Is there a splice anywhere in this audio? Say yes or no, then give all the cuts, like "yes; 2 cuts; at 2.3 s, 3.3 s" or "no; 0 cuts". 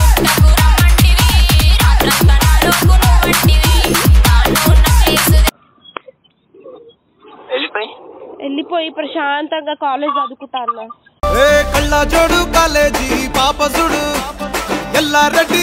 no; 0 cuts